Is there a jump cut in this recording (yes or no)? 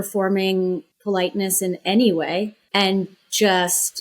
yes